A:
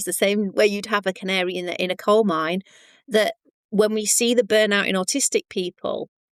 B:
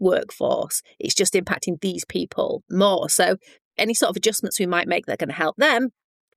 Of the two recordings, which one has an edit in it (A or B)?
B